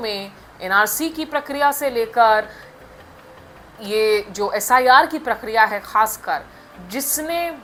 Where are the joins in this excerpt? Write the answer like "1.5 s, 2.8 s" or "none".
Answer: none